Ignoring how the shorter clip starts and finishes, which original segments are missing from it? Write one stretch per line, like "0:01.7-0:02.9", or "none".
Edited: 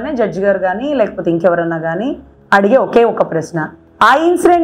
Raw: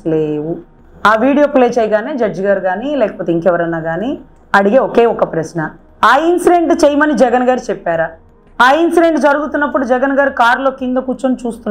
none

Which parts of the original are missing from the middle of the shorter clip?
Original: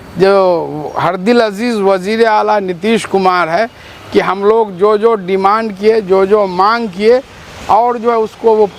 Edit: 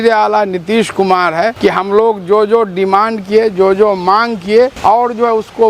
0:03.7-0:04.1
0:07.3-0:07.6

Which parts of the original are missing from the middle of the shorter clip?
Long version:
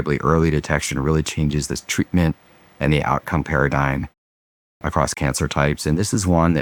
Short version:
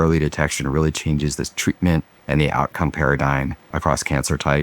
0:02.5-0:02.7
0:04.2-0:04.7

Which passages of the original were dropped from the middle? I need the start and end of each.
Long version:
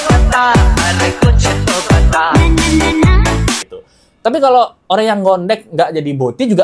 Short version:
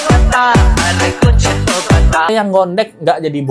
0:02.3-0:05.0

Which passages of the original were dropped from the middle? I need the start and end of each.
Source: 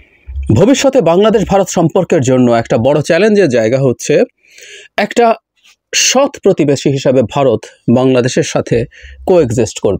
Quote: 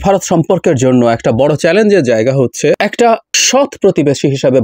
0:04.2-0:05.4

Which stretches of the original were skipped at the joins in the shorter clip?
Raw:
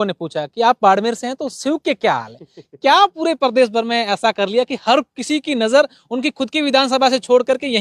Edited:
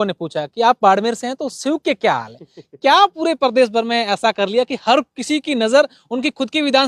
none

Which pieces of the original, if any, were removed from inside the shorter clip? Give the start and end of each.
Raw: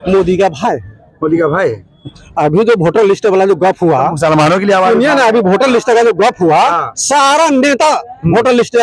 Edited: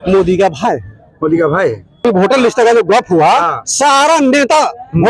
0:02.0-0:05.3

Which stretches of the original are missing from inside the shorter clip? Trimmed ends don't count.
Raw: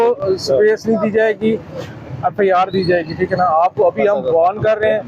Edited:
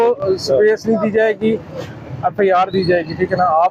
none

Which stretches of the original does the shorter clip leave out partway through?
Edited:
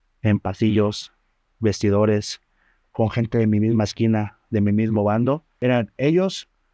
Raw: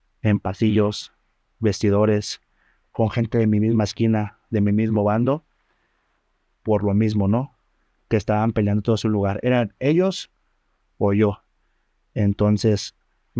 0:05.5-0:09.4

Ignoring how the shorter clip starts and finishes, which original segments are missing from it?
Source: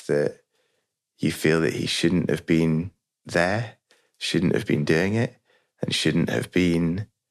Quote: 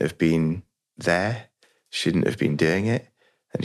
none

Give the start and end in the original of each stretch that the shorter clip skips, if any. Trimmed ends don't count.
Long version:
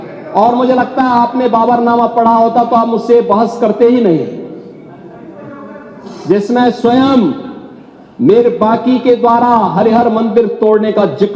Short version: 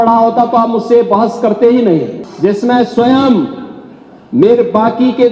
0:04.4-0:06.1

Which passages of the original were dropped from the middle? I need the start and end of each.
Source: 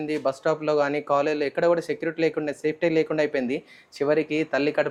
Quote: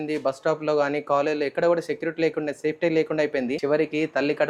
0:03.6-0:04.0

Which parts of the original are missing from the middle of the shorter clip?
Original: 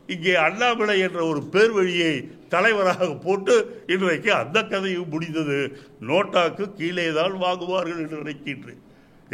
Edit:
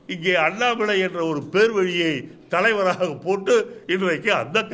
none

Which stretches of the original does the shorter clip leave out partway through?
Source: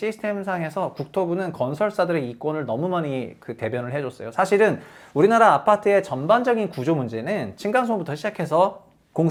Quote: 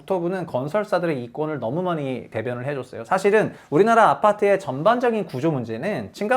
0:03.3-0:03.5
0:04.9-0:05.0

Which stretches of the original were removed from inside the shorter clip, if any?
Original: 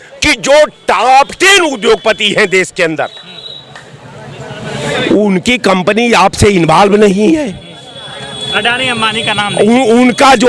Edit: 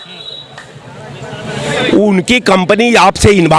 none

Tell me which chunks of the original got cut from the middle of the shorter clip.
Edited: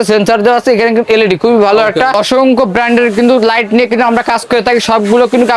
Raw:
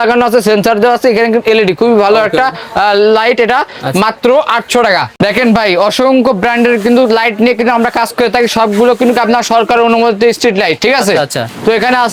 0:02.5-0:05.8

